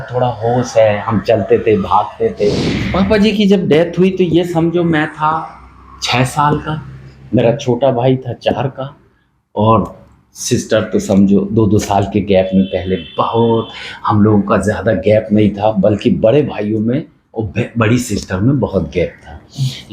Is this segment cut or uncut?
cut